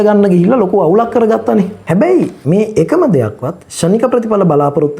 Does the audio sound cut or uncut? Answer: cut